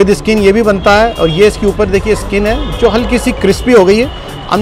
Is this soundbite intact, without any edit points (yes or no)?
yes